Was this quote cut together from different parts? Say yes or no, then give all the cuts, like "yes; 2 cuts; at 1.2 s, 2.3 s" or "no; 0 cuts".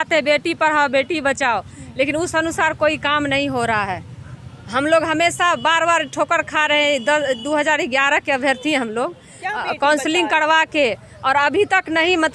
no; 0 cuts